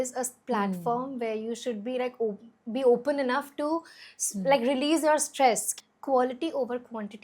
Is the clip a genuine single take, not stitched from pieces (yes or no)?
no